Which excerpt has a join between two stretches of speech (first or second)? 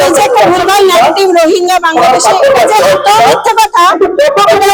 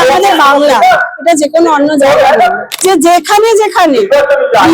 second